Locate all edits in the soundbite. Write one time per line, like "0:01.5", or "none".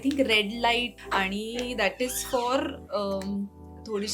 0:01.0